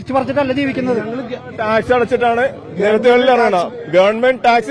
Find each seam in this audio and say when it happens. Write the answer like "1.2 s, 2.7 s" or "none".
none

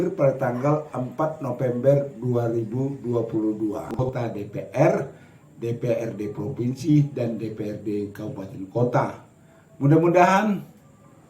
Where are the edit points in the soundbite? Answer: 4.0 s

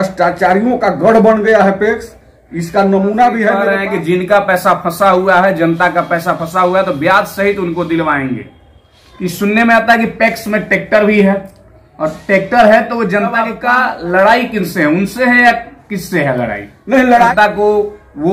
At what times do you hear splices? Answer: 3.7 s, 8.4 s, 13.5 s, 17.3 s

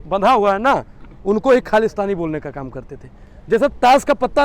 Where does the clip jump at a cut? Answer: 3.2 s

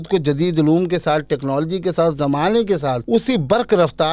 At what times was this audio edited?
3.0 s

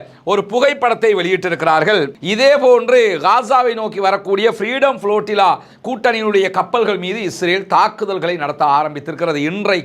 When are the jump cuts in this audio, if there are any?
2.1 s

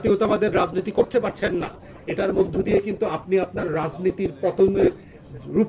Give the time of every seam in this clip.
none

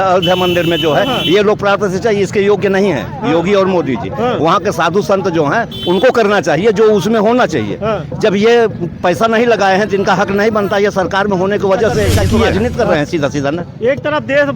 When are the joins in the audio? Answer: 12.5 s

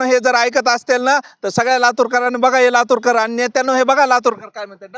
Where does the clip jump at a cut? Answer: none

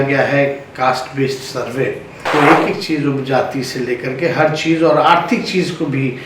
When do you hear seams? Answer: 2.2 s

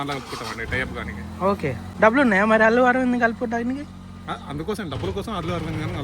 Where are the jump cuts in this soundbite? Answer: 1.8 s

